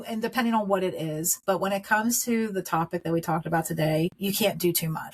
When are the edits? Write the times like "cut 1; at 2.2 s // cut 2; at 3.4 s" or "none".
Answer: cut 1; at 4.2 s